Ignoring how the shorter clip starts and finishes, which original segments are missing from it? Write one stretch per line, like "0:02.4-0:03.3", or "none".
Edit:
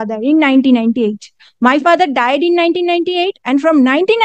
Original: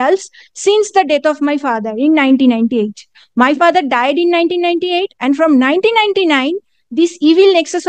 none